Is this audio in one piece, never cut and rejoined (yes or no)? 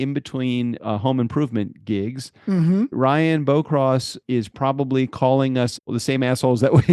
no